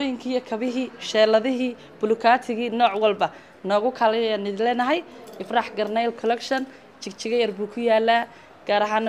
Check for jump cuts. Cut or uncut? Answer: uncut